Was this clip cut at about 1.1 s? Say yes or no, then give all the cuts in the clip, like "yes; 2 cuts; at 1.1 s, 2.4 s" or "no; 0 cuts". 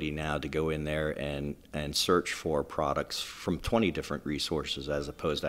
no; 0 cuts